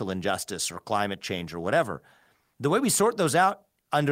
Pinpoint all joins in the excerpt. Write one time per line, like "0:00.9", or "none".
none

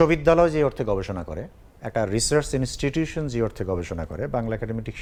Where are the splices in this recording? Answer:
none

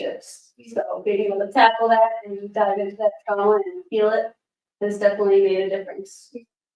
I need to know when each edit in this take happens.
none

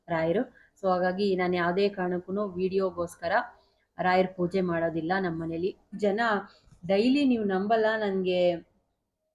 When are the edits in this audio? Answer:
0:05.9

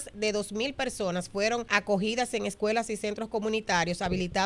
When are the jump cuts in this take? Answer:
0:01.7

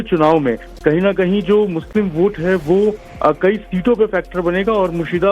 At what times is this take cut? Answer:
0:01.2

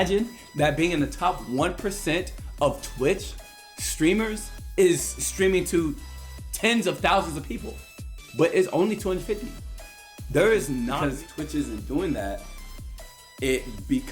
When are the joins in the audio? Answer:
0:11.0

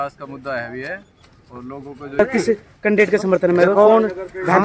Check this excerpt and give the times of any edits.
0:02.2

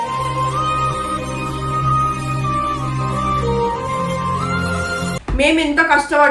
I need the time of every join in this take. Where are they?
0:05.2

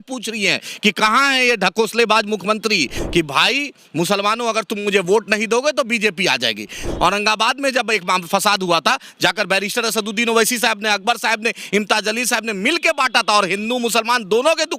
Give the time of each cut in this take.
0:03.0
0:06.9

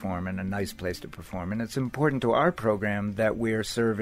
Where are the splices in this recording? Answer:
none

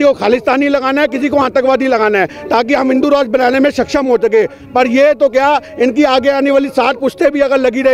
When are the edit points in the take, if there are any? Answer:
none

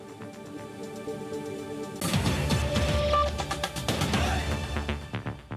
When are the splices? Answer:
0:02.0

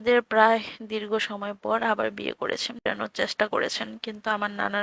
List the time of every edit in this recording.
0:02.8

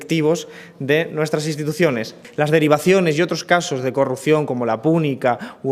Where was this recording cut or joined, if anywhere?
0:03.6

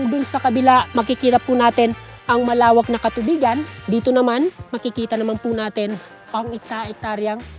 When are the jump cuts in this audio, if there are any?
0:03.7
0:04.7

